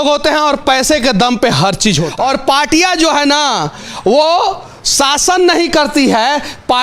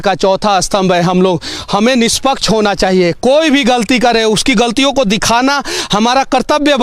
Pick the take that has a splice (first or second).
first